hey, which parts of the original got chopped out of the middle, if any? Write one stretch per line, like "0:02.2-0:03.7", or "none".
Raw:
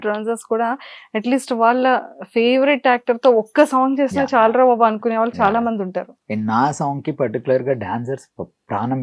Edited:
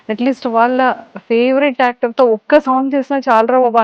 none